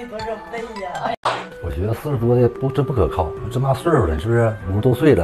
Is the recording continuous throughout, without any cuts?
no; 1 cut; at 1.2 s

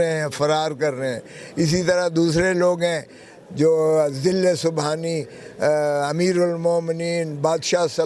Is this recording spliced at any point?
no; 0 cuts

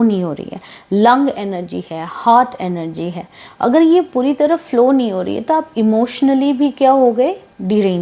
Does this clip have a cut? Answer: no; 0 cuts

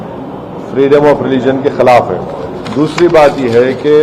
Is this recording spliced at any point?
yes; 1 cut; at 2.6 s

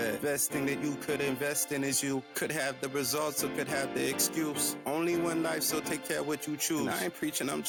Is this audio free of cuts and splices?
yes; 0 cuts

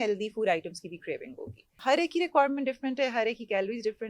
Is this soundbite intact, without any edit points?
no; 1 cut; at 1.8 s

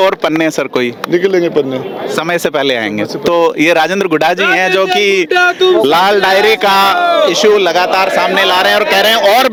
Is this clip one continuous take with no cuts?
yes; 0 cuts

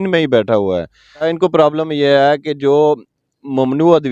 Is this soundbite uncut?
no; 1 cut; at 1.2 s

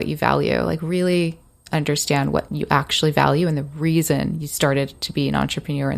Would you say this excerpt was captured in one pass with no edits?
no; 1 cut; at 2.5 s

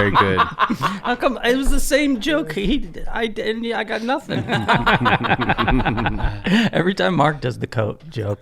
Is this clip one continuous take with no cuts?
no; 2 cuts; at 4.5 s, 6.4 s

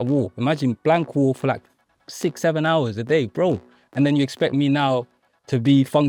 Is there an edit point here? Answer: no; 0 cuts

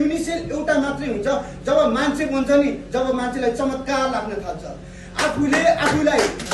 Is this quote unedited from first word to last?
yes; 0 cuts

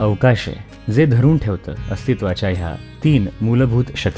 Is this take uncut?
yes; 0 cuts

